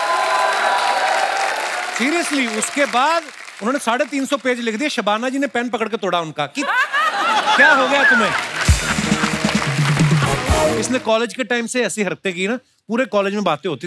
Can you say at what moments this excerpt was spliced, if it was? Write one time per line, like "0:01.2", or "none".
0:10.8